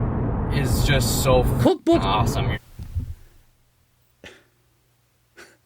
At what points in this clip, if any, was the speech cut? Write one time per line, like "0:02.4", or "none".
0:02.6